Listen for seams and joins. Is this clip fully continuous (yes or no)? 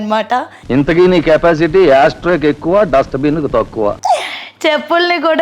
no